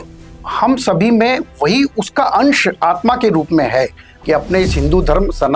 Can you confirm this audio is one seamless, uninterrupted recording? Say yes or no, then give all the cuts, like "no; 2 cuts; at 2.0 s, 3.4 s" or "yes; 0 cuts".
no; 1 cut; at 4.1 s